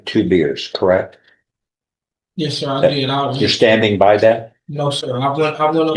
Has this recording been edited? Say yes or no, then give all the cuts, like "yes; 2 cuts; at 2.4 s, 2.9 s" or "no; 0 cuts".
no; 0 cuts